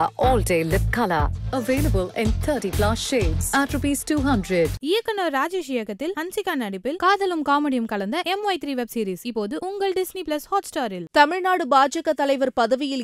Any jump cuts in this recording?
yes; 1 cut; at 11.0 s

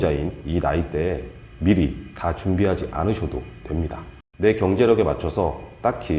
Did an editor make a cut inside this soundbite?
yes; 1 cut; at 4.2 s

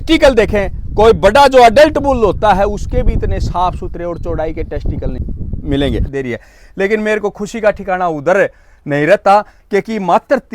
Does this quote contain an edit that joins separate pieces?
yes; 2 cuts; at 5.2 s, 6.1 s

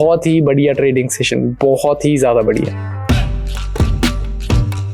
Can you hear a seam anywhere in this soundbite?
yes; 1 cut; at 3.0 s

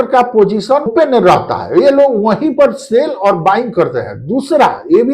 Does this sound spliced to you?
yes; 1 cut; at 0.9 s

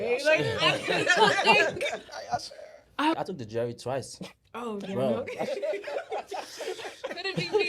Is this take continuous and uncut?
no; 1 cut; at 3.2 s

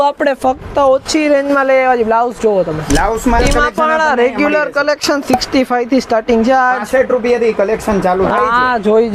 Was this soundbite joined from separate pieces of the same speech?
yes; 1 cut; at 3.4 s

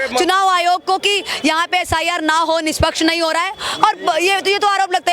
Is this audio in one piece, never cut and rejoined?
yes; 0 cuts

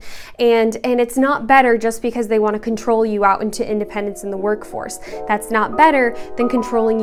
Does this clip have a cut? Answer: no; 0 cuts

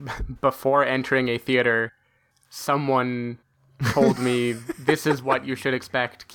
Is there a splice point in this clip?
no; 0 cuts

